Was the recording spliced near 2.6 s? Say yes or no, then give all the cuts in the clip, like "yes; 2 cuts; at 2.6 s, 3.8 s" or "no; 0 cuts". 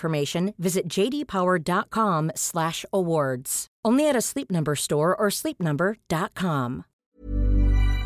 no; 1 cut; at 7.0 s